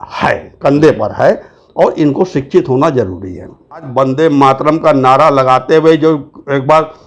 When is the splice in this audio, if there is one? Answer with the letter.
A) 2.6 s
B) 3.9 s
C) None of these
B